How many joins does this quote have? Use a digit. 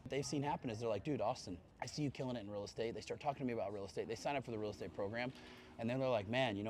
0